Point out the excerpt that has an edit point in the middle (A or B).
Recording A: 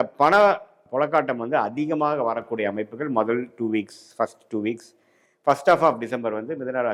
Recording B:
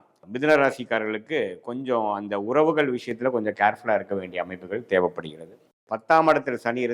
B